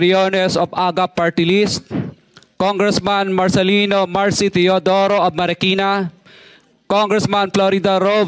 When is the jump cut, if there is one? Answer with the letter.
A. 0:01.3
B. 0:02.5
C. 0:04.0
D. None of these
D